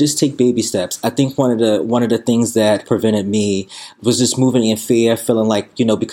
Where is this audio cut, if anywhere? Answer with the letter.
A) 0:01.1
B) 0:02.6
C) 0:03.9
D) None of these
C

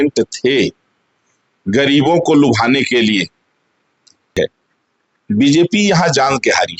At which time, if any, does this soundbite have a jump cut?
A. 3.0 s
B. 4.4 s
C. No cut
B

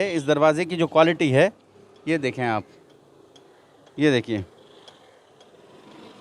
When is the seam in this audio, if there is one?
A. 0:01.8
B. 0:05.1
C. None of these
C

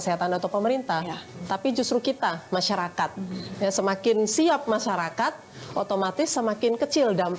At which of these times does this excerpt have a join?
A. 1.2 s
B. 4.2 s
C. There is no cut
C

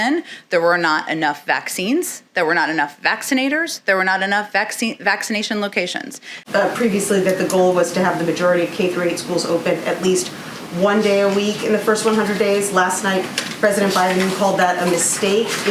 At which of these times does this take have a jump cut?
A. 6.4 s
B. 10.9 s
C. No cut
A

